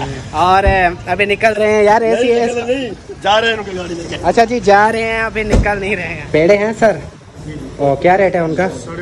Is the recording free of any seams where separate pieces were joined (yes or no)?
no